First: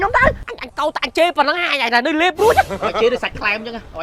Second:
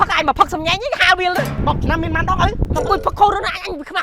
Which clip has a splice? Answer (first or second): second